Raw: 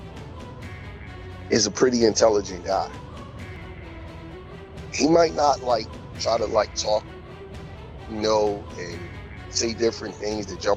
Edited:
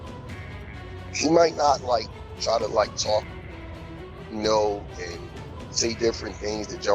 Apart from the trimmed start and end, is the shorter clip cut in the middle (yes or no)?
yes